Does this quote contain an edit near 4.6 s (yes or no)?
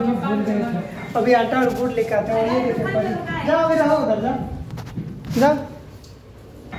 no